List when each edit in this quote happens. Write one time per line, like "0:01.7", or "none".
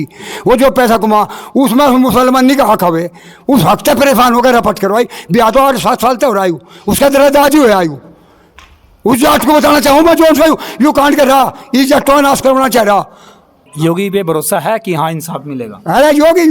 0:13.6